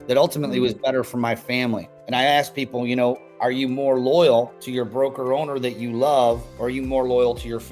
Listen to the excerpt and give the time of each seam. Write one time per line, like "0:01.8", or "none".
0:01.9
0:04.6
0:06.5